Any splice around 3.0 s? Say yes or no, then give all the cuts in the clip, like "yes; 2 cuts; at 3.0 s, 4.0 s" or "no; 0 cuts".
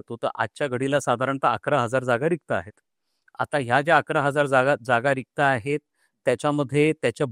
no; 0 cuts